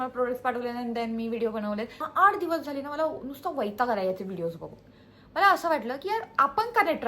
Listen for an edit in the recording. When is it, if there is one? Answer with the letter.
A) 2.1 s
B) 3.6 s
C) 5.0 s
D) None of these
A